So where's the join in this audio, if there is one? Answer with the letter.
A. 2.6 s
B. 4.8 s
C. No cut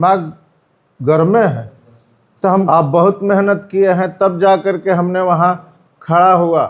A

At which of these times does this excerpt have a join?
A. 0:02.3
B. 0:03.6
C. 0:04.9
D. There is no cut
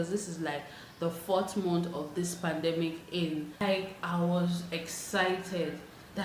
B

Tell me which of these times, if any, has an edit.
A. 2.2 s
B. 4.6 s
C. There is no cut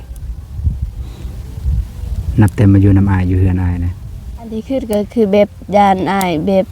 B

